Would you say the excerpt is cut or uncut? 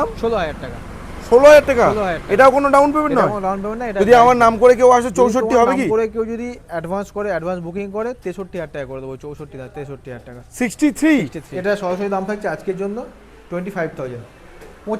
cut